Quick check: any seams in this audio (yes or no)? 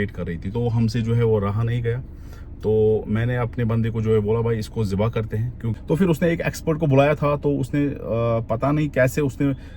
yes